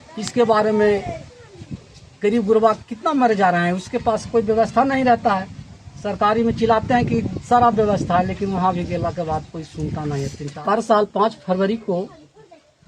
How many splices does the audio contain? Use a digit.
1